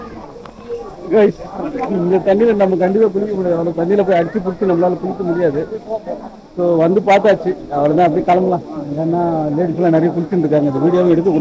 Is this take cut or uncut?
uncut